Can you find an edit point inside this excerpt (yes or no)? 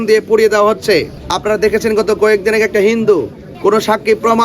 yes